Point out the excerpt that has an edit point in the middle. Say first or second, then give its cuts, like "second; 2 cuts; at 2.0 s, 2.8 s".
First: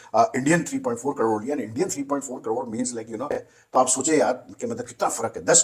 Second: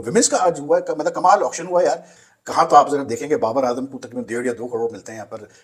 first; 1 cut; at 3.2 s